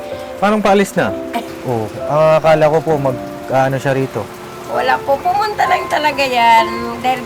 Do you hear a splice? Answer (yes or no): yes